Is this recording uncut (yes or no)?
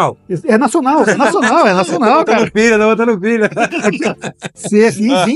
yes